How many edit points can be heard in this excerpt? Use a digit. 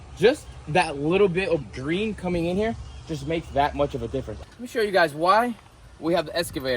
1